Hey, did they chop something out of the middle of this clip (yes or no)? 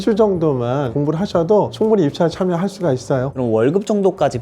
yes